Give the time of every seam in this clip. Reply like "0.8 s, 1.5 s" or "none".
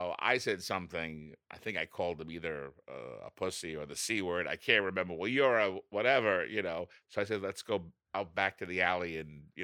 7.0 s, 8.0 s